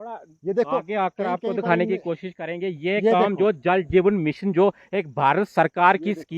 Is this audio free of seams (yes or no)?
yes